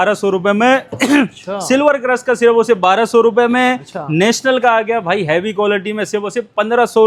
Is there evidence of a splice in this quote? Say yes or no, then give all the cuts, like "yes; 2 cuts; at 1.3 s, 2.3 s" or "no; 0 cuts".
no; 0 cuts